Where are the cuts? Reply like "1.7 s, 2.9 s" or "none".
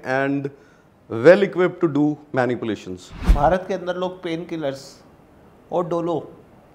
3.2 s